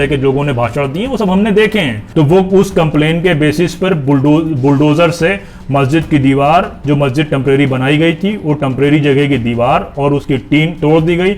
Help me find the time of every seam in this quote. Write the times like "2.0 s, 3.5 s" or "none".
2.0 s